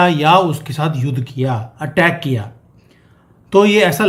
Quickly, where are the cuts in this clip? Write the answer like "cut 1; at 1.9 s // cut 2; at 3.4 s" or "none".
none